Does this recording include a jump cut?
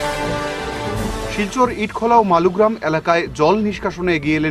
yes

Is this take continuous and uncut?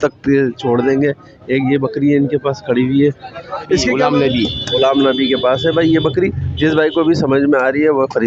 no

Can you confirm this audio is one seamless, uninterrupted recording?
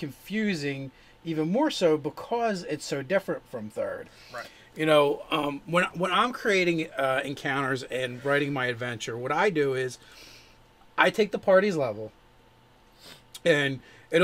yes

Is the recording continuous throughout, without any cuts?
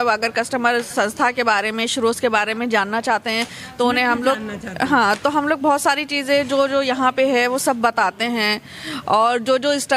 yes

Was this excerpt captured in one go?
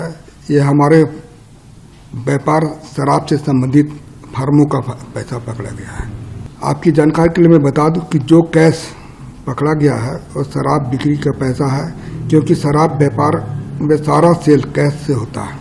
no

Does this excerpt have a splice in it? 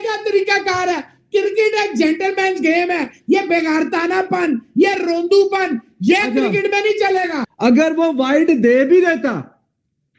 yes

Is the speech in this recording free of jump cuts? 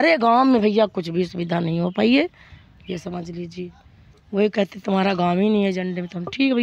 yes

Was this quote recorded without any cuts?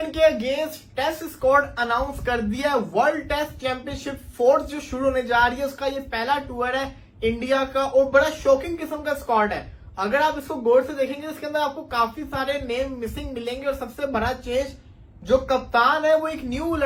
yes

